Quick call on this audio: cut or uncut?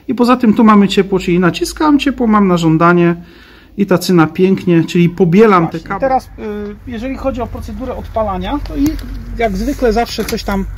cut